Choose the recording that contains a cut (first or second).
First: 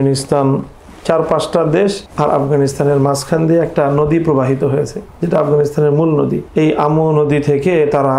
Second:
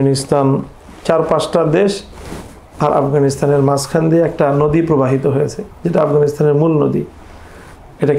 first